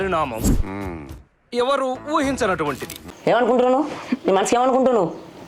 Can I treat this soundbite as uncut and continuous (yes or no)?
no